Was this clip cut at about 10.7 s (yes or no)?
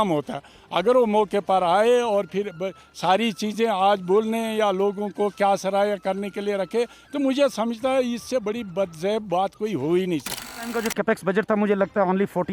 yes